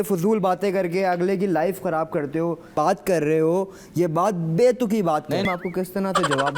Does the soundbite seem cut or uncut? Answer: cut